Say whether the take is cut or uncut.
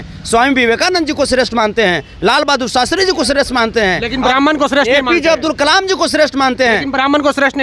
uncut